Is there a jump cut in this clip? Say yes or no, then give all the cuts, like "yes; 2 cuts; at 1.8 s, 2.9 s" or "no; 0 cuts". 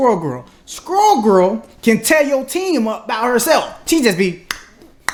no; 0 cuts